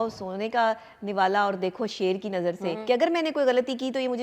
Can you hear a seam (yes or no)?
yes